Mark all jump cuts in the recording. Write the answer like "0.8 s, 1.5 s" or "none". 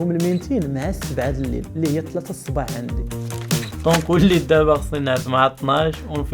3.4 s